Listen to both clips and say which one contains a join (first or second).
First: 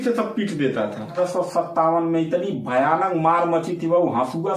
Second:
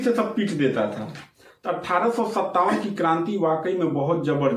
first